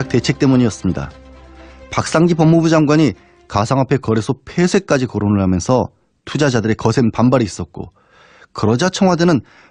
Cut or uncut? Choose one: uncut